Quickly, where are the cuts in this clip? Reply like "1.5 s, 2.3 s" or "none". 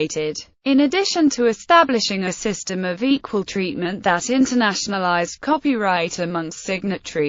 5.3 s